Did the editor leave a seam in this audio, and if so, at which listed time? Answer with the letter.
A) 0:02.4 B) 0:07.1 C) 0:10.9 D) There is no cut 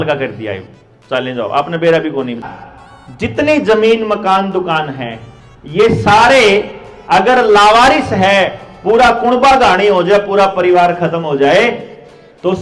A